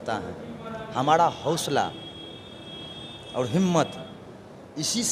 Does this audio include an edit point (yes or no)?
no